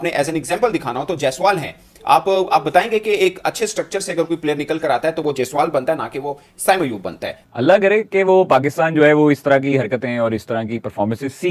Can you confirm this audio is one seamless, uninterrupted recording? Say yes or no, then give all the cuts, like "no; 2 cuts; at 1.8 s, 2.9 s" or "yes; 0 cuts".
no; 1 cut; at 7.4 s